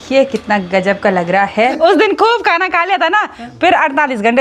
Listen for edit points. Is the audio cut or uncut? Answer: cut